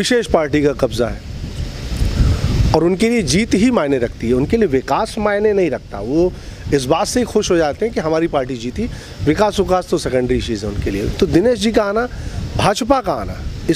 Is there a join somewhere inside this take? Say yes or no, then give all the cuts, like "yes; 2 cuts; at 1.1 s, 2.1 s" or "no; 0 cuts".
no; 0 cuts